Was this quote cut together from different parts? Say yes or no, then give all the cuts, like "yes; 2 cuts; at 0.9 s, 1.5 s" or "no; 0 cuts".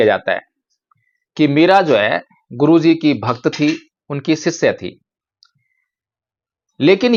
no; 0 cuts